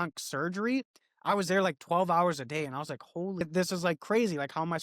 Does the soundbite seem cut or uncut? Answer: cut